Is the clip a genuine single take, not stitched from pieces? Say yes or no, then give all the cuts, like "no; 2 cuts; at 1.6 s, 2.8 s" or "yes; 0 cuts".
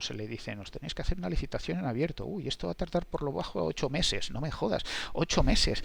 yes; 0 cuts